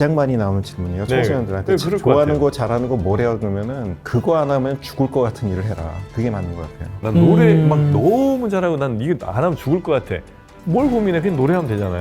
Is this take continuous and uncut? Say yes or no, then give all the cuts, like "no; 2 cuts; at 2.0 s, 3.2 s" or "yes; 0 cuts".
no; 1 cut; at 7.0 s